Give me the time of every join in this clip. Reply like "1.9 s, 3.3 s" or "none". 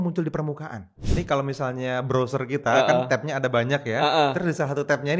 1.0 s